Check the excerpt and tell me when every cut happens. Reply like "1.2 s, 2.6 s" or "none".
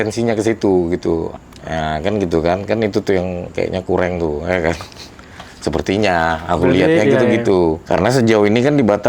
1.3 s